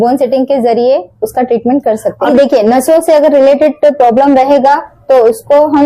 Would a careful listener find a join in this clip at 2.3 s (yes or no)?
yes